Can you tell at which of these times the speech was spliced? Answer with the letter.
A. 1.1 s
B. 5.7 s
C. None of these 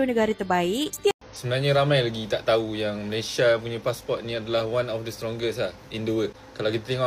A